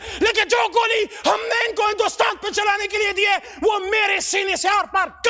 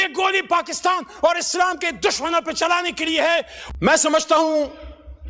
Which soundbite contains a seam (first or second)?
second